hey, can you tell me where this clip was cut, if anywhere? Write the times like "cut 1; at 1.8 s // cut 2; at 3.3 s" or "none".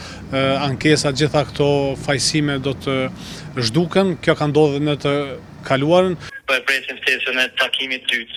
none